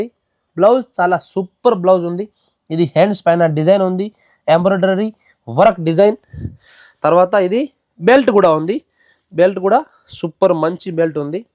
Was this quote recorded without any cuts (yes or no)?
yes